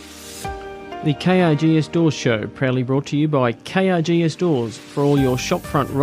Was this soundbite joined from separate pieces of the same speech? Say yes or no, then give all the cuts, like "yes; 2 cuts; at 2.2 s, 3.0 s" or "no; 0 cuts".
yes; 1 cut; at 1.0 s